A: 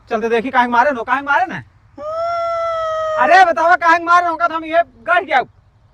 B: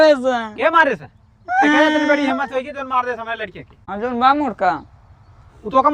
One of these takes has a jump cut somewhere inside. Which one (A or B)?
B